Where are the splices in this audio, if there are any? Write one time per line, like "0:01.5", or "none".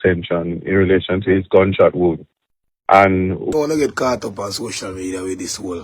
0:03.5